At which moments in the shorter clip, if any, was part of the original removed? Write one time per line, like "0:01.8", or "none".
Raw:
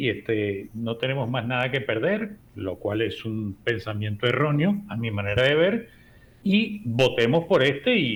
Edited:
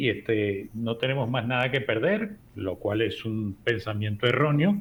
none